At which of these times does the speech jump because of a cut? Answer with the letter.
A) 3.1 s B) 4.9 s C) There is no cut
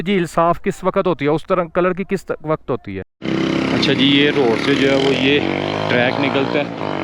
A